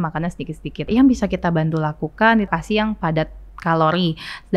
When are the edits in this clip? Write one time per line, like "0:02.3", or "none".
0:00.9
0:02.5

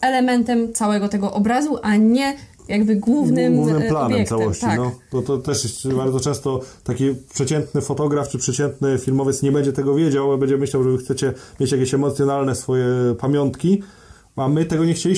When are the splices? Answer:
none

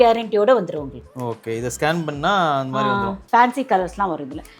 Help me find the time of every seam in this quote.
0:03.2

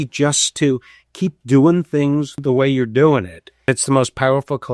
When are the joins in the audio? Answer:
0:02.3
0:03.7

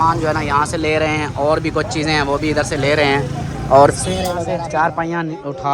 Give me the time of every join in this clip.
0:04.6

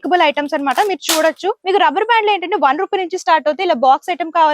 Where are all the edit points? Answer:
0:01.6

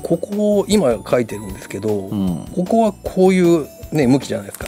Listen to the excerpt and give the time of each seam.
none

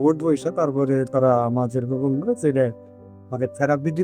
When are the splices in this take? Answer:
none

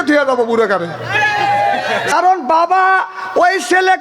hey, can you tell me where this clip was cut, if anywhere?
0:02.1

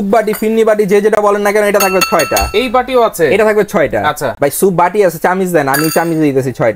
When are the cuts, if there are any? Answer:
none

